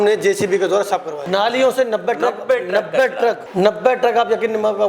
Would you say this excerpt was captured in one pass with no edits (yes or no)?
no